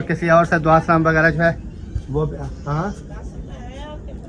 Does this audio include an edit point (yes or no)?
no